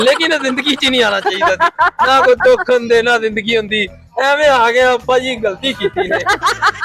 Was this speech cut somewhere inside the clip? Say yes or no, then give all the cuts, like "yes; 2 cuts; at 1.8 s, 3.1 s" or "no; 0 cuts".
no; 0 cuts